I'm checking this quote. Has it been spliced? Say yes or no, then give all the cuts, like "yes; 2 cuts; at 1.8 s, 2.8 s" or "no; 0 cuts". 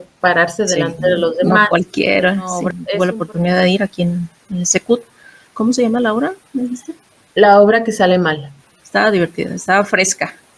yes; 2 cuts; at 2.8 s, 5.5 s